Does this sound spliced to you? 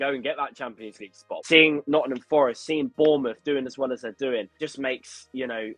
yes; 2 cuts; at 1.3 s, 4.6 s

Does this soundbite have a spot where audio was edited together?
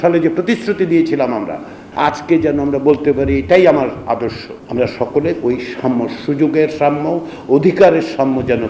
yes; 2 cuts; at 1.8 s, 4.5 s

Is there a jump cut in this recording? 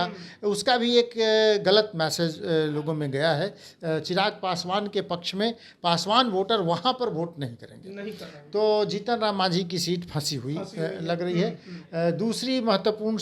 no; 0 cuts

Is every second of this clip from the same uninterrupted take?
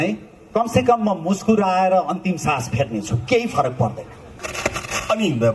no; 1 cut; at 4.4 s

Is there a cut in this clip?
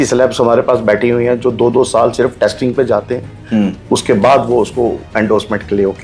no; 0 cuts

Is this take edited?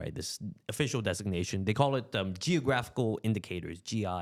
no; 0 cuts

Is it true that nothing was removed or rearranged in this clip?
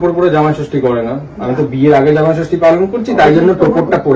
yes; 0 cuts

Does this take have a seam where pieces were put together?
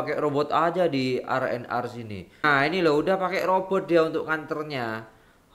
yes; 1 cut; at 2.4 s

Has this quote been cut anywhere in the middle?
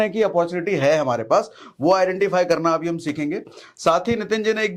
no; 0 cuts

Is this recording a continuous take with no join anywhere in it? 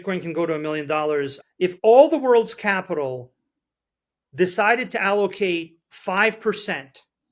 no; 1 cut; at 1.4 s

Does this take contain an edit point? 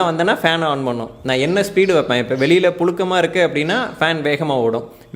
no; 0 cuts

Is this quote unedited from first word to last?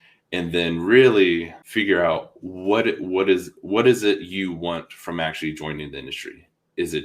no; 1 cut; at 1.6 s

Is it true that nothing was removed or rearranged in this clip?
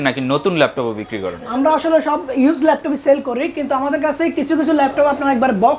yes; 0 cuts

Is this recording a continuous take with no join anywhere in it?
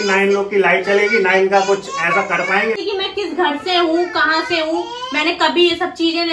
no; 1 cut; at 2.8 s

